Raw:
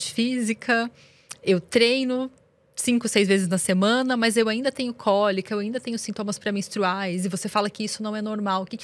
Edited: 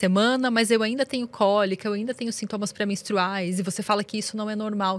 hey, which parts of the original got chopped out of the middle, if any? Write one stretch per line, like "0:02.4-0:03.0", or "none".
none